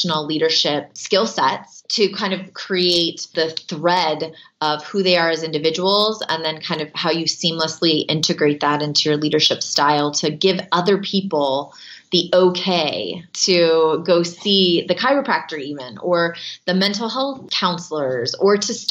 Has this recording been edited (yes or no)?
yes